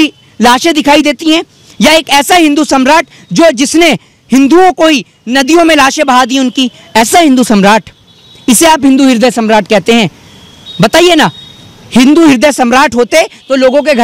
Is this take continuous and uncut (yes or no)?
yes